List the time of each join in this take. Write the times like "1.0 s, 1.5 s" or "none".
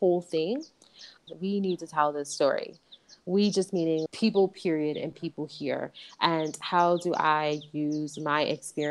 1.3 s